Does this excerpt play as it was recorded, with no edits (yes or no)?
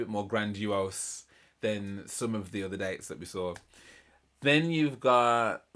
yes